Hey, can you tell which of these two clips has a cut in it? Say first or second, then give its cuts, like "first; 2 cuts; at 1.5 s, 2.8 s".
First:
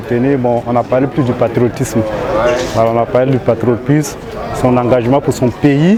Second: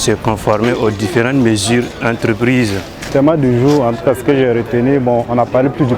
second; 1 cut; at 3.1 s